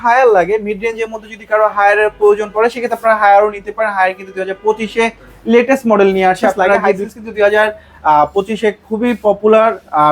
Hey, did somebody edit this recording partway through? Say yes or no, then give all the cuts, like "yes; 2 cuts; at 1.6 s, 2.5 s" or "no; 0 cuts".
yes; 1 cut; at 6.9 s